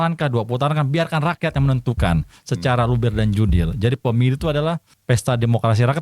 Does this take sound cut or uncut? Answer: cut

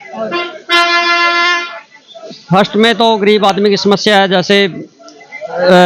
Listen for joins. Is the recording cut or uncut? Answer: uncut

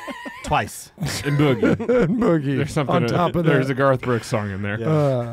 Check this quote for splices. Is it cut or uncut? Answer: uncut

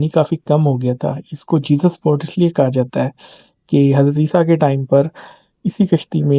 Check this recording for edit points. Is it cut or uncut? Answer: uncut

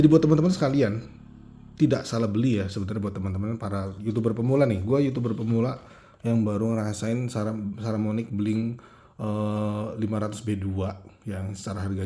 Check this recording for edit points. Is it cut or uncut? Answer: uncut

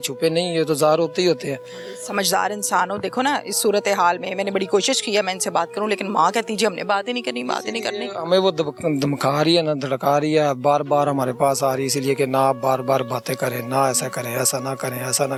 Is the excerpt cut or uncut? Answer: uncut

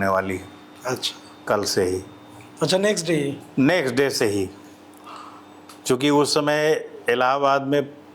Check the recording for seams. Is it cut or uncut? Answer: uncut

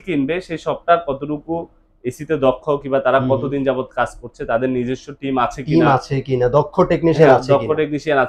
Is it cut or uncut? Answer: uncut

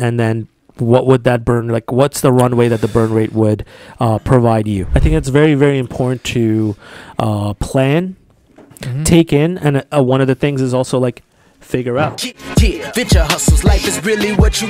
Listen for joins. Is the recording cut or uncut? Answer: cut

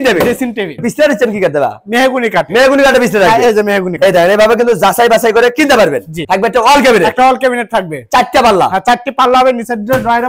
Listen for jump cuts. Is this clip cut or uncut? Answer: cut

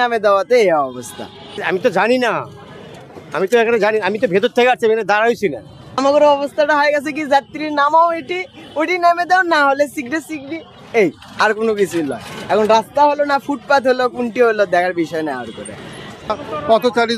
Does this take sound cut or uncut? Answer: cut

